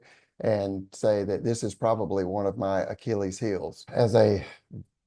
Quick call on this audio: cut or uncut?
cut